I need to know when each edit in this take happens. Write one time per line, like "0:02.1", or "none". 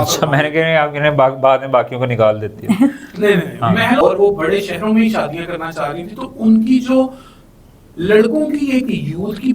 0:04.0